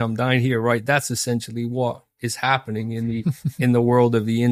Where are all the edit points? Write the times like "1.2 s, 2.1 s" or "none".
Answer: none